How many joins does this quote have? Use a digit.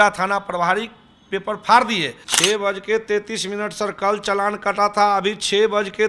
1